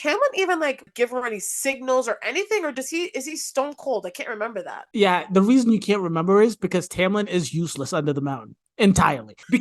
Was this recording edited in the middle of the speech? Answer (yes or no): yes